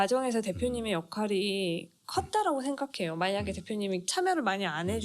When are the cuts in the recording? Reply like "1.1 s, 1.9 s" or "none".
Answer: 4.1 s